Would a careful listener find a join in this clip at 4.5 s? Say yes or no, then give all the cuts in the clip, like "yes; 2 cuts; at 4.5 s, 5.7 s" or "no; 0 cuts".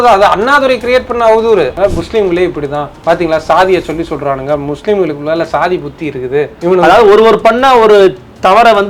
no; 3 cuts; at 1.8 s, 2.9 s, 6.5 s